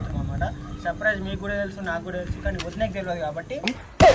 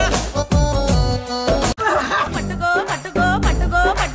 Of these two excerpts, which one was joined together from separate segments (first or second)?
second